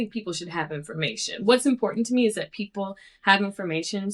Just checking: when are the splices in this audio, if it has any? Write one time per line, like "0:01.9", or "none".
none

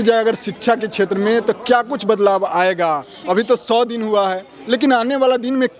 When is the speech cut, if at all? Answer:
none

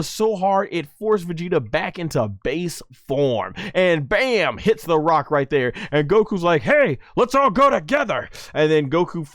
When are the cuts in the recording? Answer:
none

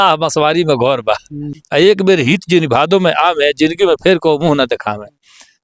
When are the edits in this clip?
0:01.4

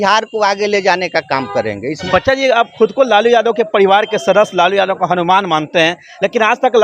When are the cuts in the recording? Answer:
0:02.0

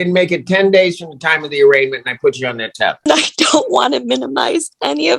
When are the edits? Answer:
0:03.1

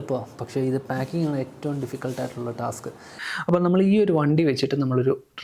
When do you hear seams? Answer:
0:03.2

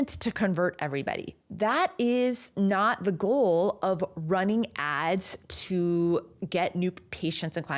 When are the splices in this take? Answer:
none

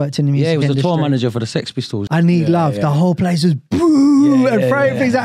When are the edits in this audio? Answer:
0:02.0

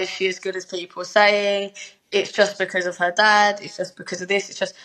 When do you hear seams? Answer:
none

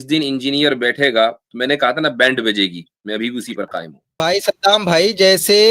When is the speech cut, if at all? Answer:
0:04.3

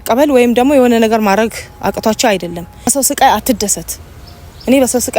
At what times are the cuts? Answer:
0:02.9

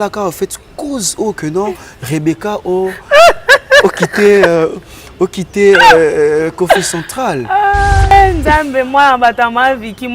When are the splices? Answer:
0:08.1

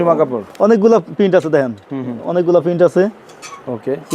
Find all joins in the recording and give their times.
none

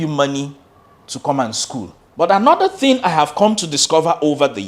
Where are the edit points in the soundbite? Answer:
0:02.0

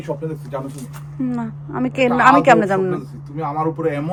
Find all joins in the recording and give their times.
none

